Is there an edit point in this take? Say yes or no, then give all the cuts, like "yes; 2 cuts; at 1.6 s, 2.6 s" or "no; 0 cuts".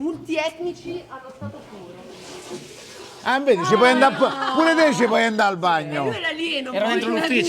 no; 0 cuts